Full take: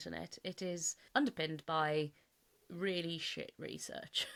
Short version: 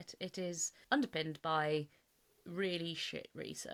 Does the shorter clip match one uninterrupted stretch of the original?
yes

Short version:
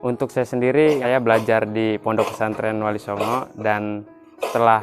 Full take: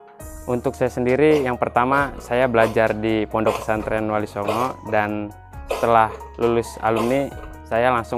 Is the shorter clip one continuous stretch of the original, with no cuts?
no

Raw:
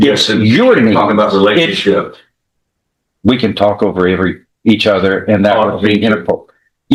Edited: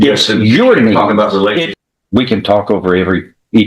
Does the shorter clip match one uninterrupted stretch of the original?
no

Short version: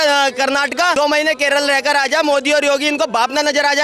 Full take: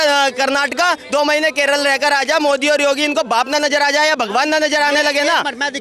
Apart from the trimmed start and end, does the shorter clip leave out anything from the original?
yes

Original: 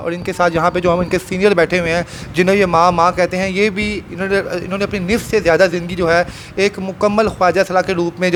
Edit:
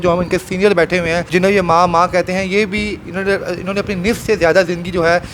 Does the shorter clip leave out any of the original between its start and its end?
yes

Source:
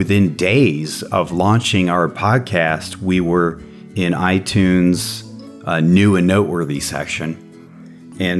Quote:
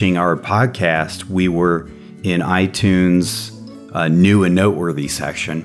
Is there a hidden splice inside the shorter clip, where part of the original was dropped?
no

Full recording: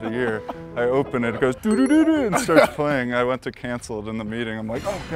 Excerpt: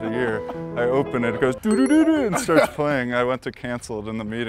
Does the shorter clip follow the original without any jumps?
yes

